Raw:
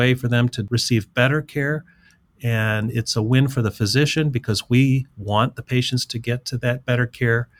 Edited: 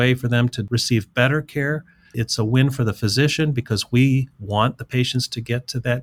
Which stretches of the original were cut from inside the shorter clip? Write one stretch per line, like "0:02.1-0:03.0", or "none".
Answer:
0:02.2-0:03.0